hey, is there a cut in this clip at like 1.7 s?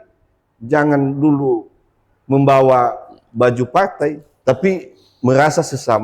no; 1 cut; at 4.3 s

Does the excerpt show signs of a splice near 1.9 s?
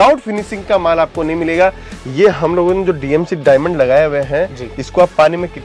yes; 1 cut; at 1.9 s

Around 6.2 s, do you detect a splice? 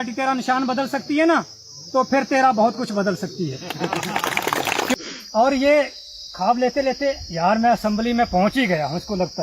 no; 1 cut; at 4.9 s

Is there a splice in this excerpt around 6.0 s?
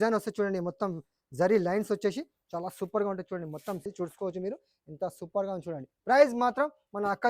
no; 1 cut; at 3.8 s

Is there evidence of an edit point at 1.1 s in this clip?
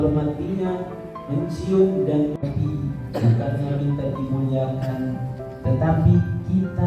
no; 1 cut; at 2.4 s

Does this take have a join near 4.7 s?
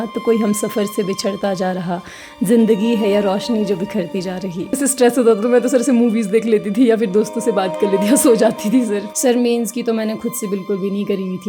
yes; 2 cuts; at 4.7 s, 9.1 s

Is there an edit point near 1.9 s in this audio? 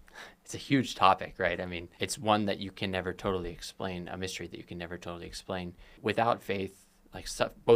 yes; 2 cuts; at 1.9 s, 5.9 s

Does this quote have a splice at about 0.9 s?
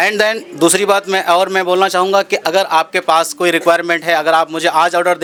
no; 0 cuts

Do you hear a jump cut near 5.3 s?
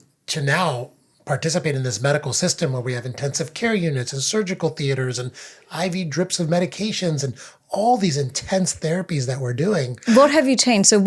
no; 1 cut; at 9.9 s

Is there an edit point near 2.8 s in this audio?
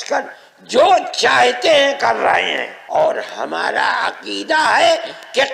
yes; 1 cut; at 2.8 s

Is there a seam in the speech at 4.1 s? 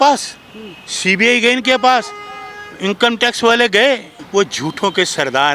yes; 1 cut; at 4.1 s

